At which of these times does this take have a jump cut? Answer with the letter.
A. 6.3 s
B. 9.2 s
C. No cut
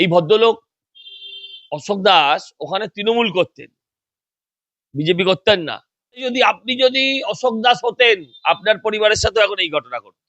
A